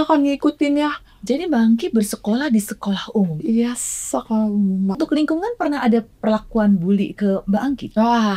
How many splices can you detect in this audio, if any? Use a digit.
1